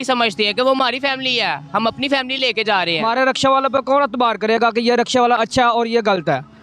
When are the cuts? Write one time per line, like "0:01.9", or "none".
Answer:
0:03.0